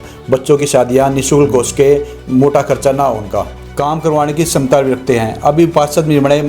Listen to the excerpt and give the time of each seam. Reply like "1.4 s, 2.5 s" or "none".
3.6 s